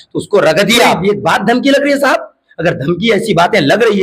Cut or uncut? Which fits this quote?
cut